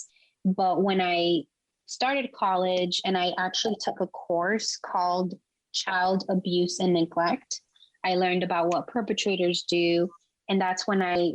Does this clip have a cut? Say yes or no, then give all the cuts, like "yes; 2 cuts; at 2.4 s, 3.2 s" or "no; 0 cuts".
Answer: yes; 1 cut; at 7.8 s